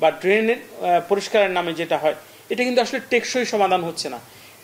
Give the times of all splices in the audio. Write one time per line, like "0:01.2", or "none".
none

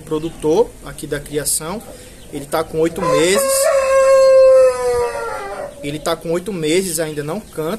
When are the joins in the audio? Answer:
none

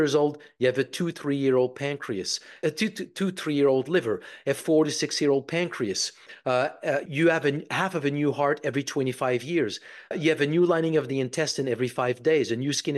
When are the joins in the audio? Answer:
0:02.5
0:07.1
0:10.1

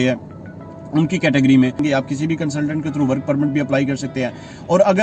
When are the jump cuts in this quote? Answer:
0:01.8

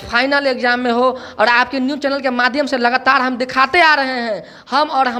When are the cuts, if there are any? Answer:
none

